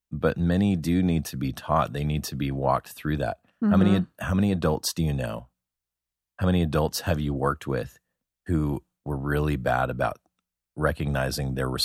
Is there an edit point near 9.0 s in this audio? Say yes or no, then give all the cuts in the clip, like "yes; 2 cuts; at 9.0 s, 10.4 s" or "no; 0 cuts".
no; 1 cut; at 10.7 s